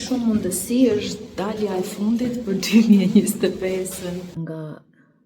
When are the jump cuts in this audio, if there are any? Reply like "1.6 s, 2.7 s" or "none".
4.4 s